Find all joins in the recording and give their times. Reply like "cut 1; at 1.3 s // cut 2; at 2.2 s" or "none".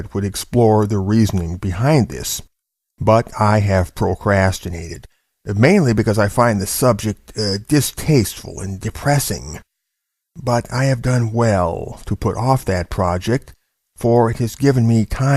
cut 1; at 11.8 s